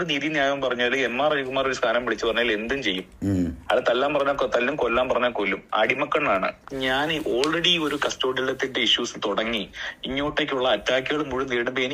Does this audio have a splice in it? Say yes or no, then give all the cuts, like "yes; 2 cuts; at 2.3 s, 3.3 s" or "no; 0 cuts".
yes; 1 cut; at 6.6 s